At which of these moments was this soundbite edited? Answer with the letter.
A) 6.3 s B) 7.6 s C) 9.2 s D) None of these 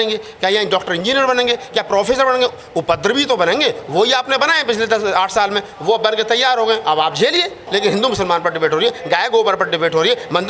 B